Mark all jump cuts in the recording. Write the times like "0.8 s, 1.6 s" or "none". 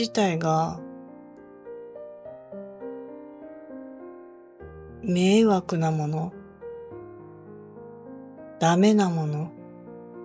0.8 s, 5.0 s, 9.5 s